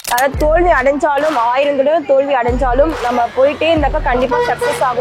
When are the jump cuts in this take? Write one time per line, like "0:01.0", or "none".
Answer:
none

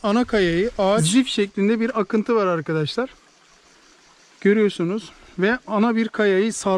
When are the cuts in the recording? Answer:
0:01.0

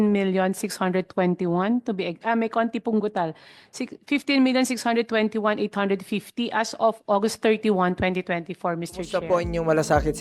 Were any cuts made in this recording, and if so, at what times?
0:09.0

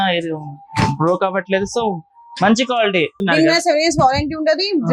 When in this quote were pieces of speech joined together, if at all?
0:03.2

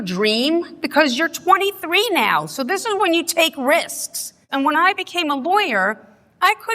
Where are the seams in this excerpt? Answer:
0:04.4

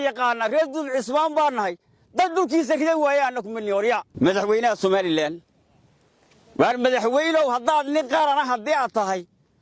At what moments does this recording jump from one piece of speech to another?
0:04.1

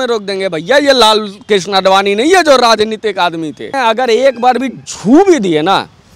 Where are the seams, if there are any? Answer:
0:03.7

